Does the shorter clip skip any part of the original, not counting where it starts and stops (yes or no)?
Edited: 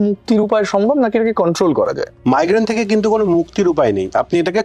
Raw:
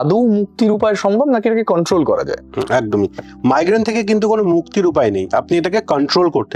yes